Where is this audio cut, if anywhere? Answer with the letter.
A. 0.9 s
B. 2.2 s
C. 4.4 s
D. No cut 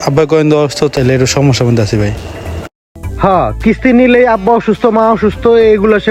A